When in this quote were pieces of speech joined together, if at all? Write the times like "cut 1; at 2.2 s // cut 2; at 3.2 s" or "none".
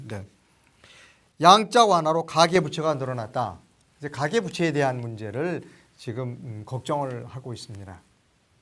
cut 1; at 3.6 s